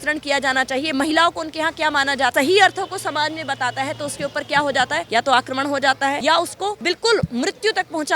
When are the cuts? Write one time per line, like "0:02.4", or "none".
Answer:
0:02.3
0:05.1
0:06.5